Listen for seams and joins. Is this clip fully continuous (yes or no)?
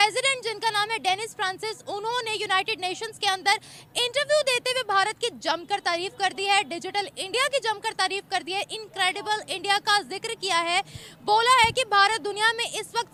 yes